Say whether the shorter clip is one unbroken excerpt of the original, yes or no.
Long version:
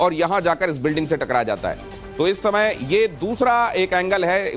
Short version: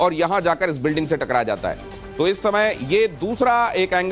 yes